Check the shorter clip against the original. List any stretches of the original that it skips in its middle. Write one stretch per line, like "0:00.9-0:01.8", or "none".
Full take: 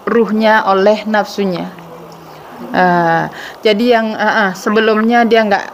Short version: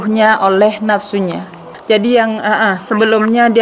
0:01.9-0:03.4

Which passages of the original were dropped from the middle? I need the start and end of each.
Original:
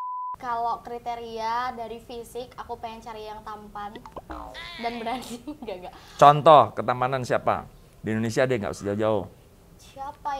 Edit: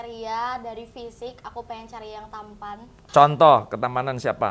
0:04.1-0:06.0

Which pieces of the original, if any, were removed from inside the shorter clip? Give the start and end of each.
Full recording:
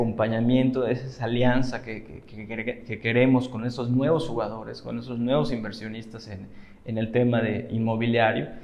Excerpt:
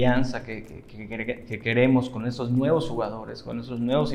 none

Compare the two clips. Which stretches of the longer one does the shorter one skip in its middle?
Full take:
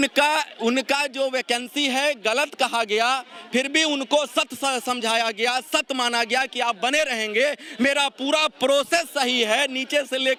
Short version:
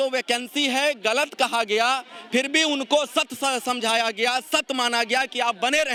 none

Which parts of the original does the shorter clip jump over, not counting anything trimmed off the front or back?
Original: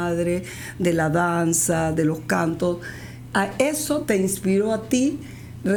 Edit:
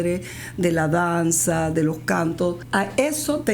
0:02.8-0:03.2

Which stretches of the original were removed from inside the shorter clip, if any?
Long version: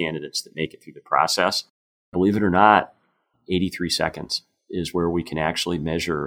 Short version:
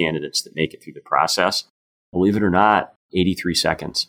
0:03.0-0:03.3

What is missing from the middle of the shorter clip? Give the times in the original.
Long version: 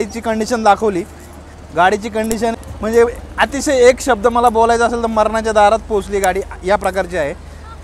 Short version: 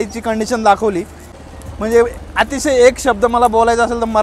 0:01.6-0:02.6

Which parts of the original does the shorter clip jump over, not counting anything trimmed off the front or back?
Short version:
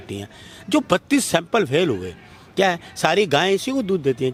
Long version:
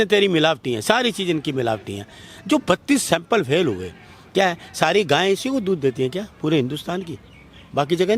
none

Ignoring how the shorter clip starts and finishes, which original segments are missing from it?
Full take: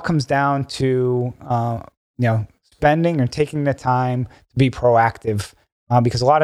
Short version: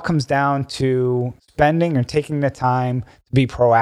0:01.4-0:02.6

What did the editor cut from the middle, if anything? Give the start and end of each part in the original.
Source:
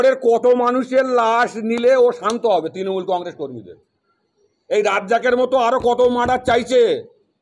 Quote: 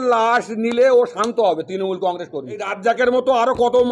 0:03.8-0:05.0

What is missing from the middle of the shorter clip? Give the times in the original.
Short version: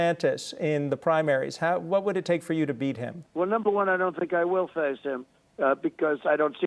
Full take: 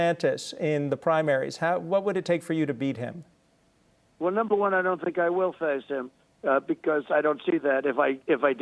0:03.2-0:04.0

